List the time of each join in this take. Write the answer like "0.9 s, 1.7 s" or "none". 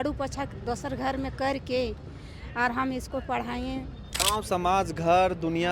4.1 s

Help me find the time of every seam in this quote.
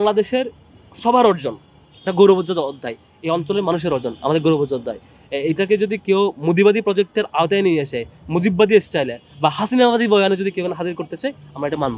none

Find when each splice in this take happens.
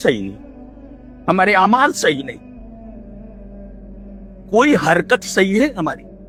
none

